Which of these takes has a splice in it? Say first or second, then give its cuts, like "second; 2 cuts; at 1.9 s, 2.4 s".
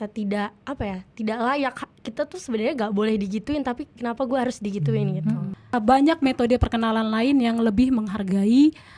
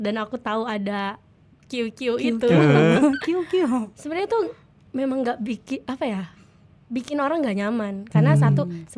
first; 1 cut; at 5.5 s